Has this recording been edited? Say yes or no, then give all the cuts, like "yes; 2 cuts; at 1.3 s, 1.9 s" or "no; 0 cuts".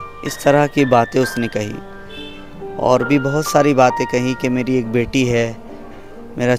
no; 0 cuts